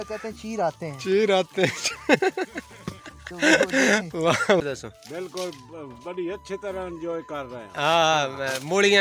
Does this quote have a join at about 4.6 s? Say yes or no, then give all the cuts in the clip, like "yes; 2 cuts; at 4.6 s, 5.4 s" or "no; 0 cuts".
yes; 1 cut; at 4.6 s